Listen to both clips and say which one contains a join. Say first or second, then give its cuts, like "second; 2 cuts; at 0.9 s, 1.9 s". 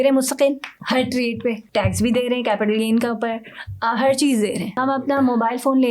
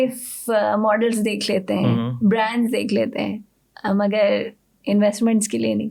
first; 2 cuts; at 1.6 s, 4.8 s